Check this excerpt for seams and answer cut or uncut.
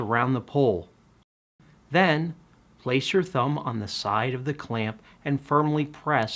cut